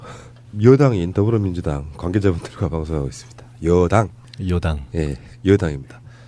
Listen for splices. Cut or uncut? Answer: cut